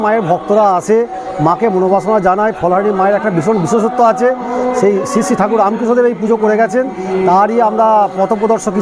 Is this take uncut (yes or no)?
yes